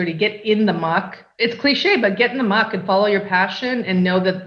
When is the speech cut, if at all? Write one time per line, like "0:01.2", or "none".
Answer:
0:01.2